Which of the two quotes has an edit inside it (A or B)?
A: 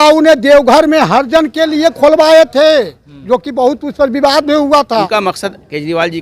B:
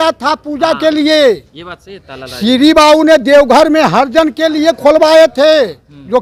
A